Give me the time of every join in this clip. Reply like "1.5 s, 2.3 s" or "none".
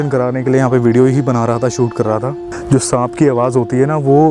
2.5 s